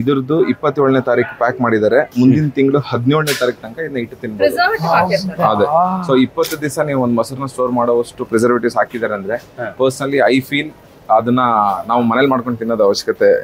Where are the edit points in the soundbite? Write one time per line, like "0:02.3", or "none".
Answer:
none